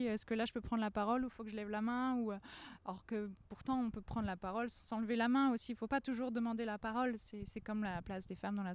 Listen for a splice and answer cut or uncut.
uncut